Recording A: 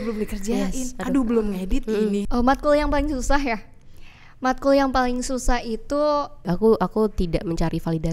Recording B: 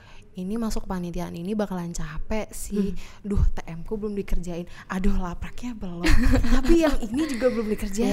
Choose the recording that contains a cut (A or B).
A